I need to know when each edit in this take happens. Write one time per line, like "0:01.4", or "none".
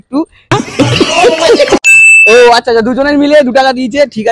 0:01.8